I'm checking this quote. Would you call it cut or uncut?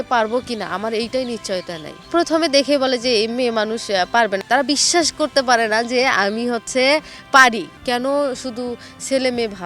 cut